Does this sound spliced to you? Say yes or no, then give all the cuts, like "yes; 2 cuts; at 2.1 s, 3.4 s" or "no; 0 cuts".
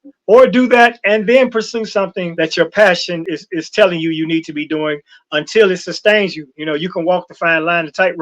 yes; 2 cuts; at 2.2 s, 3.3 s